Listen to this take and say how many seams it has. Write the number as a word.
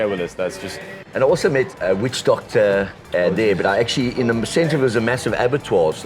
one